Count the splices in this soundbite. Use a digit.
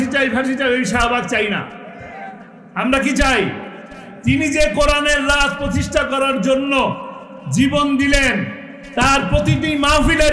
0